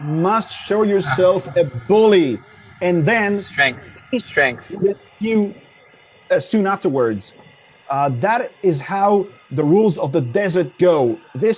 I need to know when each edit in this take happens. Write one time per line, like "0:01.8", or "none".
none